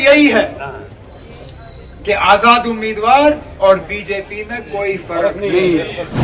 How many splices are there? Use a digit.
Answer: 0